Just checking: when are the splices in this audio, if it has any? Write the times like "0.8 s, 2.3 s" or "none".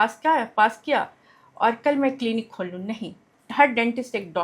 3.3 s